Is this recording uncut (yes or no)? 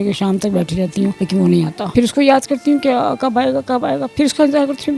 no